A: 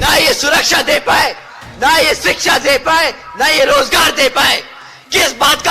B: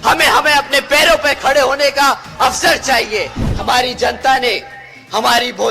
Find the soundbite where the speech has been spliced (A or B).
B